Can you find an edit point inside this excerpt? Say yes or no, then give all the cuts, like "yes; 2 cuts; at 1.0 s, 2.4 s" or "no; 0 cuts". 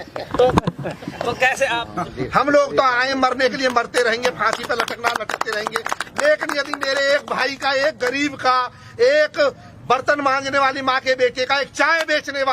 no; 0 cuts